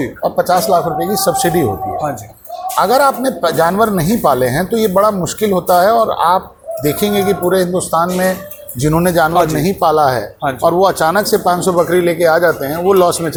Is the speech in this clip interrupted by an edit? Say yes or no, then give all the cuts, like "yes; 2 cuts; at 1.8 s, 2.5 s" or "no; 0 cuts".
no; 0 cuts